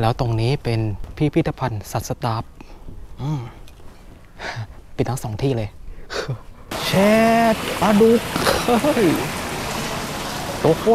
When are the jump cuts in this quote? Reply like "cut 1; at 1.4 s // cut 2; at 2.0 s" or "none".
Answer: cut 1; at 1.0 s // cut 2; at 6.7 s

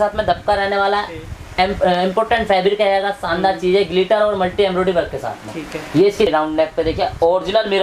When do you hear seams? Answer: cut 1; at 6.3 s

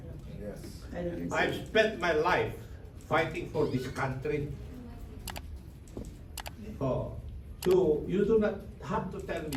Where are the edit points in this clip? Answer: none

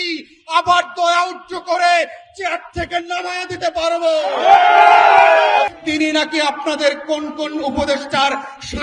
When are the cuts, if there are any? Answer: cut 1; at 5.8 s

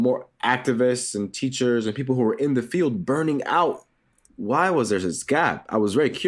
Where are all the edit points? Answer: cut 1; at 4.1 s

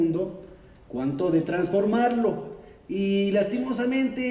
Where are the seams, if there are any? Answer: cut 1; at 1.1 s

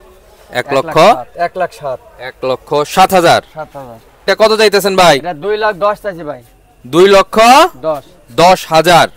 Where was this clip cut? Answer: cut 1; at 4.2 s

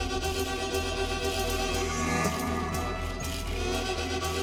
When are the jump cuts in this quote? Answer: none

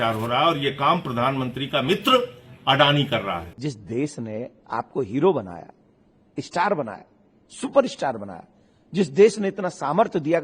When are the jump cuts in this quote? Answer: cut 1; at 3.5 s

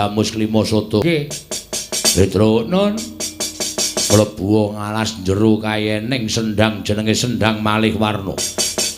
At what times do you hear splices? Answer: cut 1; at 1.0 s

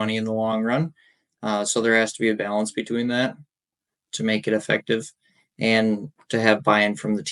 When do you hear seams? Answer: none

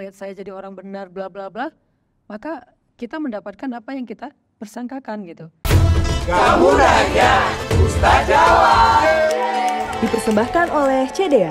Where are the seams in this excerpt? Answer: cut 1; at 5.6 s

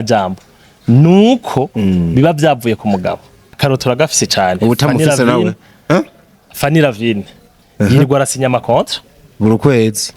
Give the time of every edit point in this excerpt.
cut 1; at 3.6 s

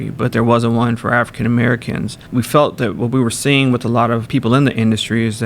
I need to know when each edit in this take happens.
cut 1; at 2.2 s // cut 2; at 4.2 s

